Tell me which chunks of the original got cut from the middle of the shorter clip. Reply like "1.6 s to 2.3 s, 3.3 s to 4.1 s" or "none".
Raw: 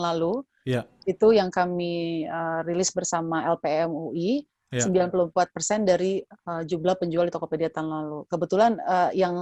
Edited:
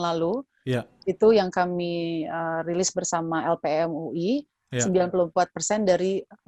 none